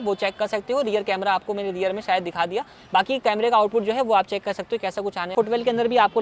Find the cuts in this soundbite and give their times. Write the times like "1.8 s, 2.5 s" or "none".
5.3 s